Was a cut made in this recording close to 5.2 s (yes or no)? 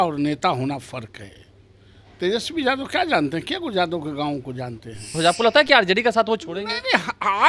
yes